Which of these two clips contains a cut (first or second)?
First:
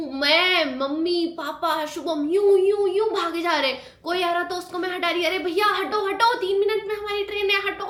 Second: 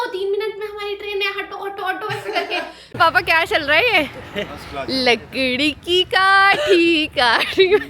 second